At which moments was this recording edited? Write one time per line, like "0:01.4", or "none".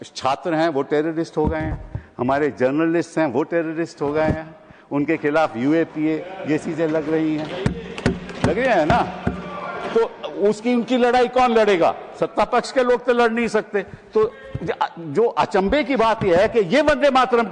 none